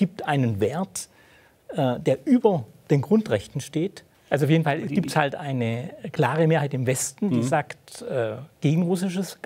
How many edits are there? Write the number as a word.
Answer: one